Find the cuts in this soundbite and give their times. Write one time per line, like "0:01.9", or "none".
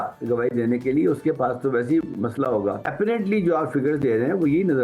0:02.8